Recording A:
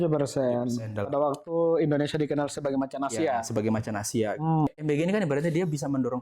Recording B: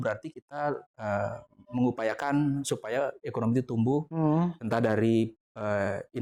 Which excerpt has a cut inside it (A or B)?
A